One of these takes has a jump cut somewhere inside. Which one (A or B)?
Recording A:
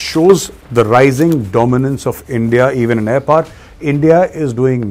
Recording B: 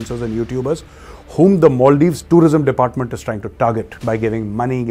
B